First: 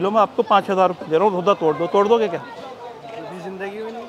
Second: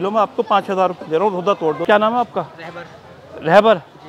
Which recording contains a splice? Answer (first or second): second